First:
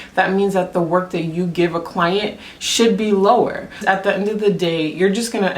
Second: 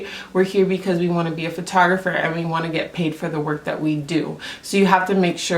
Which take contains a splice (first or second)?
first